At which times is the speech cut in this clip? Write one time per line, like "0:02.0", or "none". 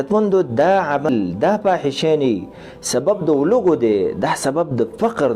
0:01.1